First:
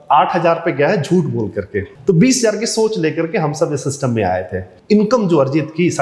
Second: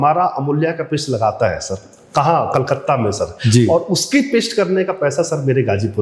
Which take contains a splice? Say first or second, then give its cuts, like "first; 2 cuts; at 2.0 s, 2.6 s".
first; 2 cuts; at 1.8 s, 4.7 s